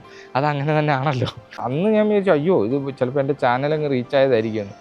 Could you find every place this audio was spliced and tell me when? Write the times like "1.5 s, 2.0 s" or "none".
1.6 s